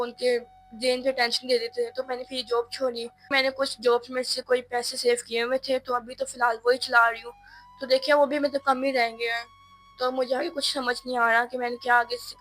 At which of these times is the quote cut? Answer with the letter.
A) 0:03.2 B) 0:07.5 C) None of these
A